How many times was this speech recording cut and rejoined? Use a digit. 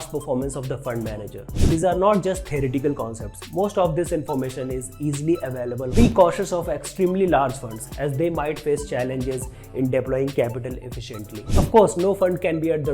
3